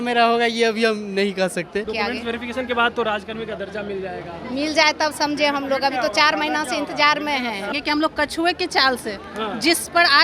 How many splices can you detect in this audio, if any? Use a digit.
2